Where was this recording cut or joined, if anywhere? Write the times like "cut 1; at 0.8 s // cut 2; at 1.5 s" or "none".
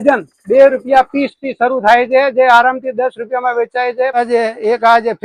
cut 1; at 4.2 s

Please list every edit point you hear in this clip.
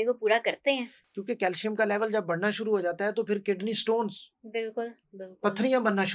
cut 1; at 1.0 s

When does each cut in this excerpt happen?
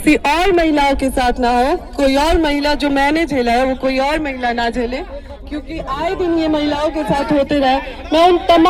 none

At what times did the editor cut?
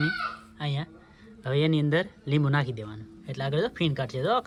none

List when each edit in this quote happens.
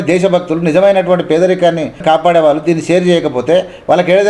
cut 1; at 2.0 s

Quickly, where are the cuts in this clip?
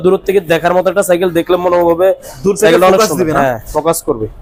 none

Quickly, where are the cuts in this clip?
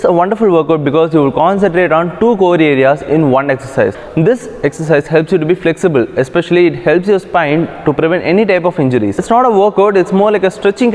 cut 1; at 4.0 s // cut 2; at 9.1 s

